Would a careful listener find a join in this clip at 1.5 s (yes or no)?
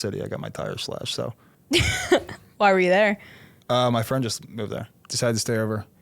yes